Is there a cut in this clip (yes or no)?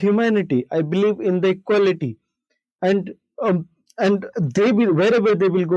no